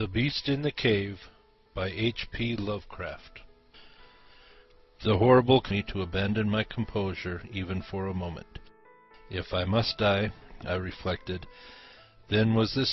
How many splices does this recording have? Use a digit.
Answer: 0